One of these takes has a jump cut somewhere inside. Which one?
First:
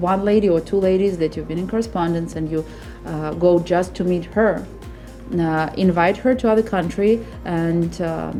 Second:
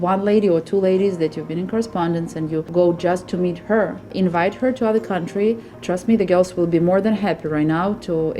second; 3 cuts; at 2.7 s, 4.1 s, 5.7 s

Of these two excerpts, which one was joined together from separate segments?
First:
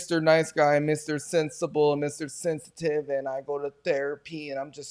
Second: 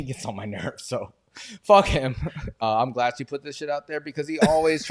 second; 1 cut; at 2.5 s

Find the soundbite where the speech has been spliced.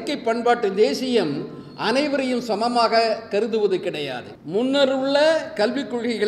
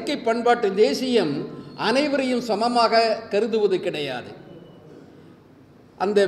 first; 1 cut; at 4.3 s

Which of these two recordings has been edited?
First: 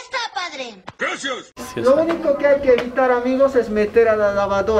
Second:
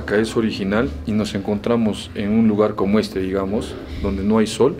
first; 1 cut; at 1.6 s

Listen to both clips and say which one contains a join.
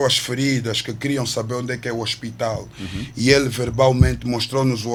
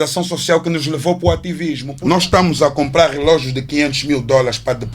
second; 1 cut; at 1.8 s

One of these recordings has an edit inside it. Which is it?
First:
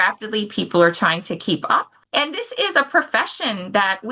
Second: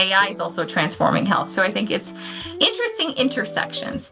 first; 1 cut; at 2.0 s

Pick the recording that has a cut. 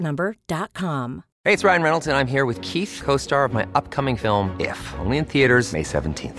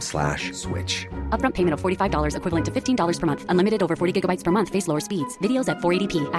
first; 1 cut; at 1.3 s

